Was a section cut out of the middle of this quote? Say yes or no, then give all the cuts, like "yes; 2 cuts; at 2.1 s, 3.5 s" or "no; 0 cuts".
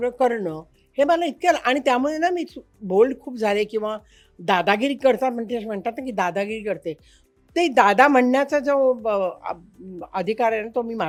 no; 0 cuts